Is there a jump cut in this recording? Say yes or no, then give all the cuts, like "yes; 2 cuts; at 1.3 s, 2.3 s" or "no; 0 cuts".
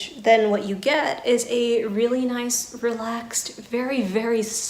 no; 0 cuts